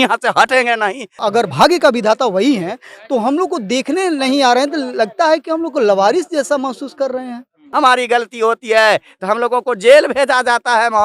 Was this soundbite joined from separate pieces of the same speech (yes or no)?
yes